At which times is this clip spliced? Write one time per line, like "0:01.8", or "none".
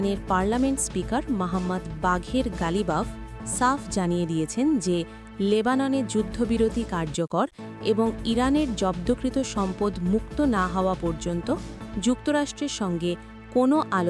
none